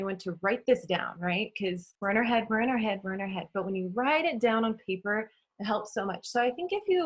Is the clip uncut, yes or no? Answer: no